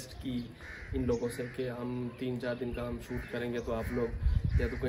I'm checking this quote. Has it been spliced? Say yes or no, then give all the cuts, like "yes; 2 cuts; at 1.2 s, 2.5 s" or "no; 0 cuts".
no; 0 cuts